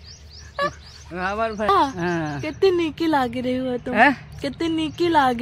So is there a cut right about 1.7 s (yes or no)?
yes